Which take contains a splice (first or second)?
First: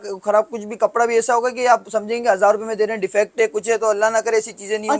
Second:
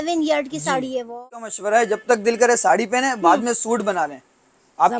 second